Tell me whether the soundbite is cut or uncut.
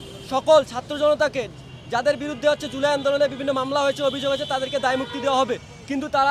uncut